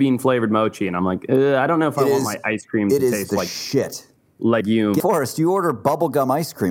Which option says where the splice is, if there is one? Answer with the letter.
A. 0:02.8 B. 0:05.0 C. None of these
B